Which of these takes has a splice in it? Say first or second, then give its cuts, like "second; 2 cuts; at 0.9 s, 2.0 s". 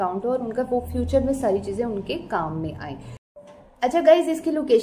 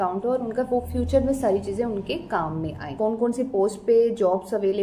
second; 1 cut; at 2.9 s